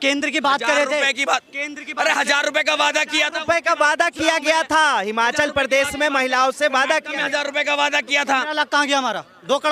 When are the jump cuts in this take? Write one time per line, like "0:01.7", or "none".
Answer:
none